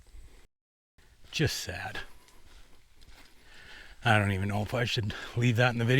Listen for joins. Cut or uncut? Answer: cut